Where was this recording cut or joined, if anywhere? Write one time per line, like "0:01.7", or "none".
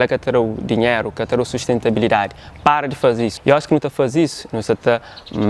0:03.4